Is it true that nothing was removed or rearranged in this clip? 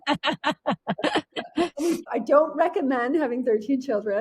no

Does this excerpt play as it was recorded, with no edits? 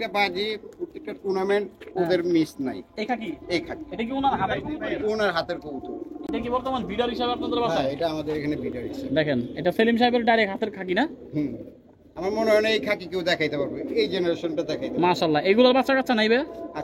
yes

